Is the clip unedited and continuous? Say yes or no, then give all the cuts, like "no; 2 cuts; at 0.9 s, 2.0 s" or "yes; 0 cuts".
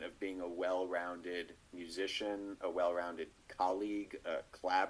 yes; 0 cuts